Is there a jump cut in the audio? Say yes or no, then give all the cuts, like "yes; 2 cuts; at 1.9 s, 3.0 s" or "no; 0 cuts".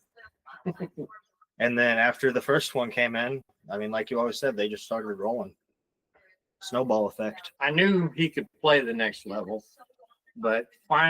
yes; 1 cut; at 7.5 s